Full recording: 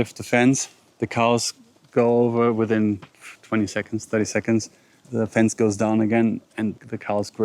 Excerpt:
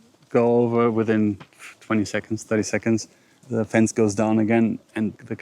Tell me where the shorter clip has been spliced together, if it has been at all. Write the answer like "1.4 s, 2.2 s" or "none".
none